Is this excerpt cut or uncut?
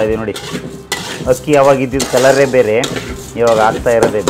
uncut